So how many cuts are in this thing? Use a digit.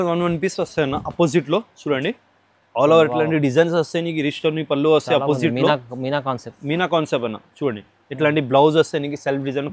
0